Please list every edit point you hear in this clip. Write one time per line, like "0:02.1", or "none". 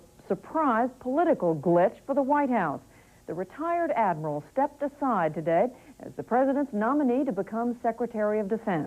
0:05.0